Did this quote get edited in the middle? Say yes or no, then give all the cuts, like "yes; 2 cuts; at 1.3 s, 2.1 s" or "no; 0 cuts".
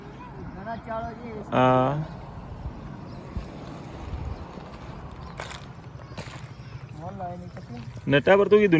no; 0 cuts